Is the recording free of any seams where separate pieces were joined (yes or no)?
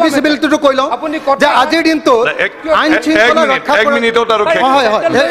yes